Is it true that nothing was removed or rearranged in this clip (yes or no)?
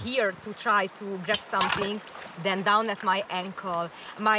yes